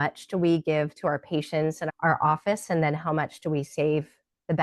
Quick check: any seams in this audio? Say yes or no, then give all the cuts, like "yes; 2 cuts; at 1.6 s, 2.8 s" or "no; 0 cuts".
yes; 1 cut; at 1.9 s